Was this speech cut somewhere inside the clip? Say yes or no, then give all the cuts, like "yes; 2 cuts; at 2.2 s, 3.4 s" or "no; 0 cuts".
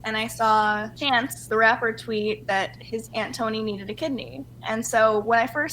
yes; 1 cut; at 1.1 s